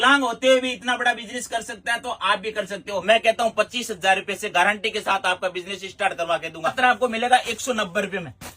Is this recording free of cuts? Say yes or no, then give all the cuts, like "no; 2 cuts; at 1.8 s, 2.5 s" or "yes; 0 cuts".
no; 2 cuts; at 3.0 s, 6.8 s